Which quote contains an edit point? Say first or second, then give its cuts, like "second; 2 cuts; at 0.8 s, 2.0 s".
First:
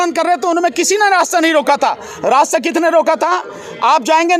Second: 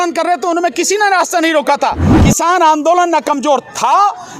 second; 1 cut; at 2.1 s